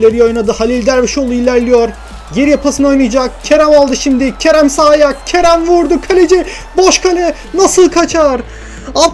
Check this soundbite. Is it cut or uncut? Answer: uncut